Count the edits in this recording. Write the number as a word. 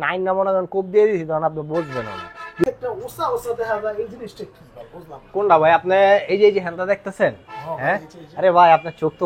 one